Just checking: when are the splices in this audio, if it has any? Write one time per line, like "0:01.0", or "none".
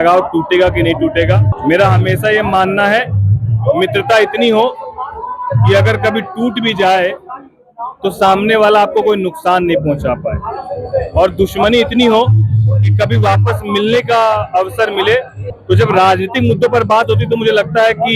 0:01.5
0:15.5